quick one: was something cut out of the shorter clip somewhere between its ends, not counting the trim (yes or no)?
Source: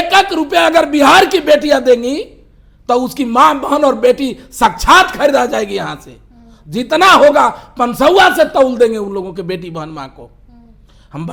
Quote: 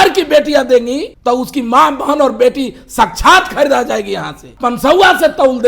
yes